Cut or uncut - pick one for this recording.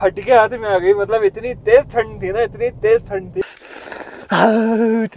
cut